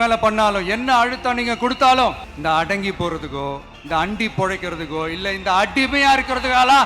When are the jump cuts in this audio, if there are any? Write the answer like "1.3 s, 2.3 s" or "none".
2.3 s, 3.7 s